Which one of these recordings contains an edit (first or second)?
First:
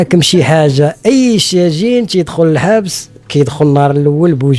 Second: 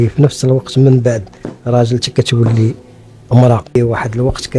second